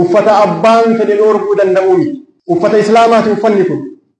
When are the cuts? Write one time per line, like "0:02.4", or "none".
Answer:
0:02.3

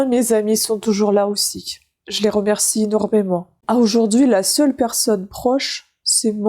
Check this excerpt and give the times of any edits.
0:03.6

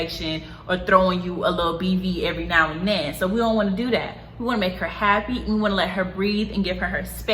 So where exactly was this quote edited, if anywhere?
none

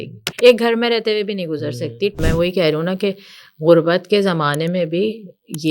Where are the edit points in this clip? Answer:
0:02.2

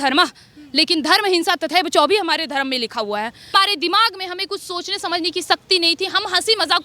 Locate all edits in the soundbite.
0:03.5

